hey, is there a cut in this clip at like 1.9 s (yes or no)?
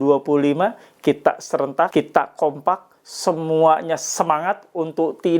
yes